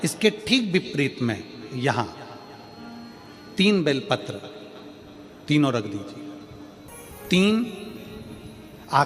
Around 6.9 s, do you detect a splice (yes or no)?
yes